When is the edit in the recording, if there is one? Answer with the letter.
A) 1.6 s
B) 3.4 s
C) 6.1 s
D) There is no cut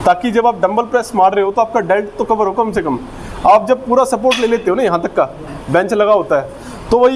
D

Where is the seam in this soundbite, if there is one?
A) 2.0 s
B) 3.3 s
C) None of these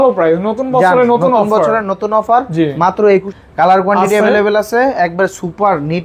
B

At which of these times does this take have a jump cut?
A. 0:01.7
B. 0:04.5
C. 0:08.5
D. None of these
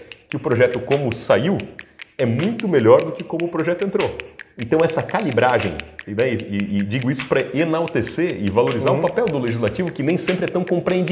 D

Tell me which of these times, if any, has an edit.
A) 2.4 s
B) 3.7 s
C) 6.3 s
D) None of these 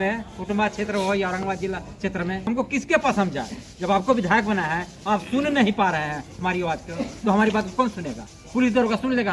A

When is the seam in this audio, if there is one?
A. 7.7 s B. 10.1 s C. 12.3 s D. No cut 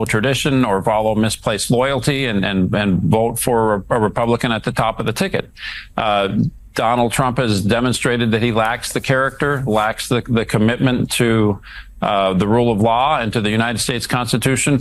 D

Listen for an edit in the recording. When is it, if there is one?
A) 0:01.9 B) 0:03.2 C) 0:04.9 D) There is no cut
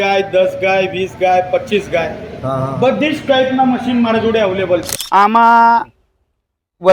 C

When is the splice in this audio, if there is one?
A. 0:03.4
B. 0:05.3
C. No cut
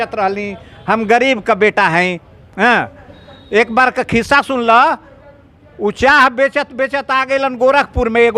C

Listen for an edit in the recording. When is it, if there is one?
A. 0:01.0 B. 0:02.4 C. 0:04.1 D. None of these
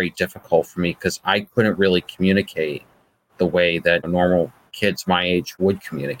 C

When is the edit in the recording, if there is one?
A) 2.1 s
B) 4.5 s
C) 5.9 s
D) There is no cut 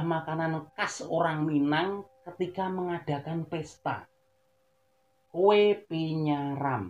D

